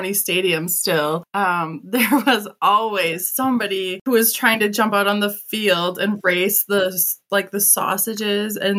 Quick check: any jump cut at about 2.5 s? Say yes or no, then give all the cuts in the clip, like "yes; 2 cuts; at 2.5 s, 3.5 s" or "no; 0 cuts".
no; 1 cut; at 1.3 s